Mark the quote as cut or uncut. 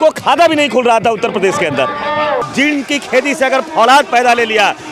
cut